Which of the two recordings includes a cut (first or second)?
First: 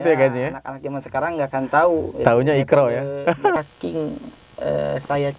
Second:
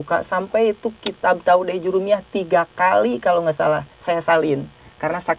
first